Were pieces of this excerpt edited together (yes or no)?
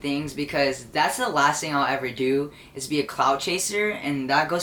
no